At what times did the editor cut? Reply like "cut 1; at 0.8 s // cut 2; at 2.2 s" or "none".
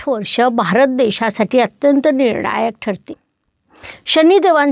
cut 1; at 3.1 s